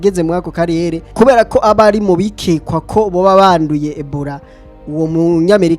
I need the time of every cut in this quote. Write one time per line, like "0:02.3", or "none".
0:01.0

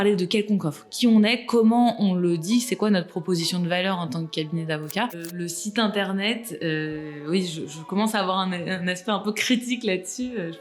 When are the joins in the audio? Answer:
0:05.3

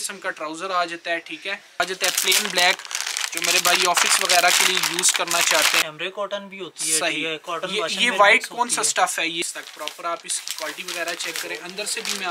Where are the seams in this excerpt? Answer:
0:01.8
0:05.8
0:09.4

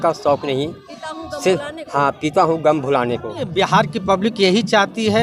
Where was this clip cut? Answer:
0:03.4

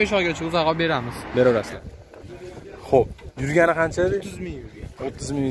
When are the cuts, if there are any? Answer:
0:01.8

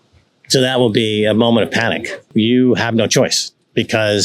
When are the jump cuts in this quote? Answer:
0:02.2

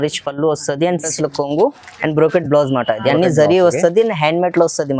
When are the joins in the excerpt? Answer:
0:01.1

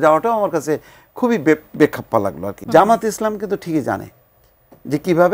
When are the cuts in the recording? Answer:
0:02.5

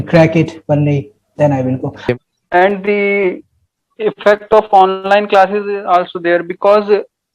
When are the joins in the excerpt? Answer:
0:01.9

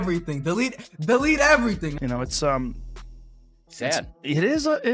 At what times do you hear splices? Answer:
0:01.8

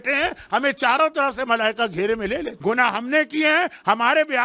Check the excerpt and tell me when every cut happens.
0:02.5

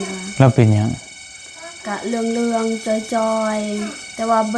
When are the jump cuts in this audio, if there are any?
none

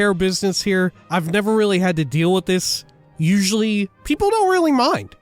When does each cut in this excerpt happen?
0:01.0
0:03.9

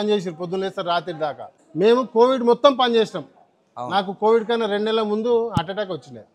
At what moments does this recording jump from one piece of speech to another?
0:01.5

